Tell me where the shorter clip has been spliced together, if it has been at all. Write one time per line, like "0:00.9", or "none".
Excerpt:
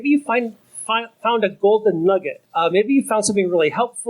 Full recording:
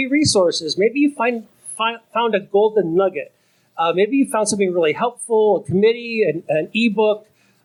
0:02.4